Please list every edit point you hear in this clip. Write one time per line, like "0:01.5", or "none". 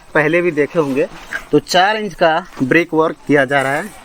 none